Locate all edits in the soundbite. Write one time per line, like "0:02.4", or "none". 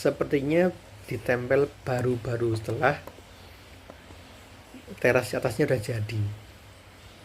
none